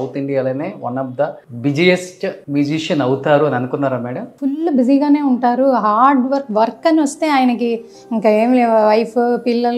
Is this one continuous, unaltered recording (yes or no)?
no